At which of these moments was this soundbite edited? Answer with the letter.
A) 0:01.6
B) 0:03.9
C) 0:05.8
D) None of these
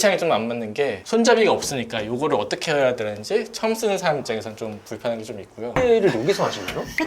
C